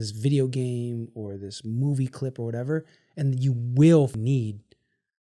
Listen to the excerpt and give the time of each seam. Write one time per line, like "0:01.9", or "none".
0:04.2